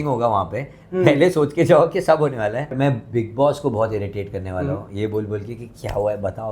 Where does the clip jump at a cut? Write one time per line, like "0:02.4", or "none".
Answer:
0:02.7